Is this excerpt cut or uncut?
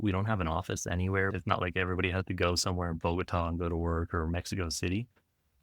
uncut